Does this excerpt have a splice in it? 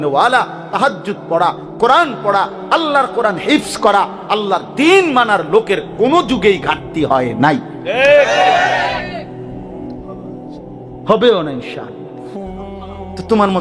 no; 0 cuts

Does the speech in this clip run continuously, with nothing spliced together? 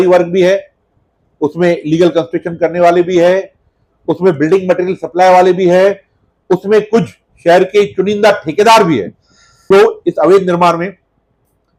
yes; 0 cuts

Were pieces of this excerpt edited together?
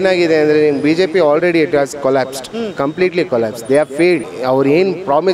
yes; 1 cut; at 4.3 s

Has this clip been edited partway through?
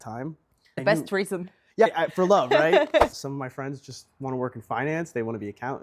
yes; 1 cut; at 3.1 s

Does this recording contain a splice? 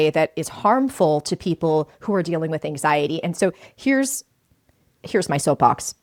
no; 0 cuts

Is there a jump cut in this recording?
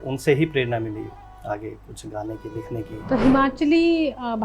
yes; 1 cut; at 2.9 s

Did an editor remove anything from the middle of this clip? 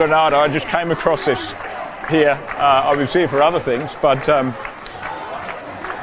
no; 0 cuts

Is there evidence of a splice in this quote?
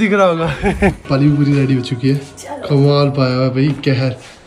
yes; 1 cut; at 1.0 s

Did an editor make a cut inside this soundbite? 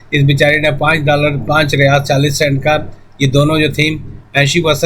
no; 0 cuts

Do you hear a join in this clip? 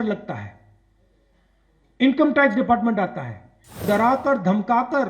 yes; 1 cut; at 3.8 s

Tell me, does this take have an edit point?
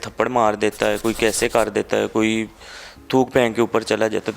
no; 0 cuts

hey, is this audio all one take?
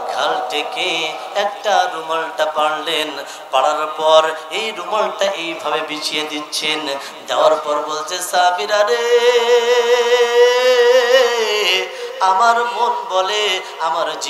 yes; 0 cuts

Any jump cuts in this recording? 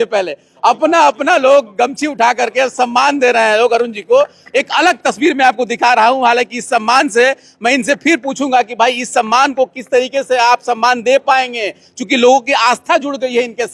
no; 0 cuts

